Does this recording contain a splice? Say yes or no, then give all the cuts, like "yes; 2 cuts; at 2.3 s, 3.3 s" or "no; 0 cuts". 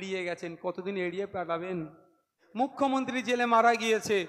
yes; 1 cut; at 2.4 s